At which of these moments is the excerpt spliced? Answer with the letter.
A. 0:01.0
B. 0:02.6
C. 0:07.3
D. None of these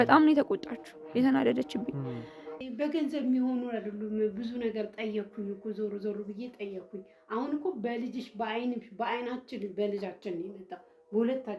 B